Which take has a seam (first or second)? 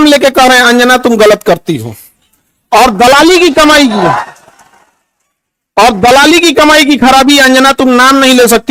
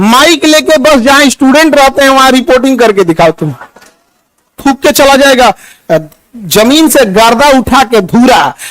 second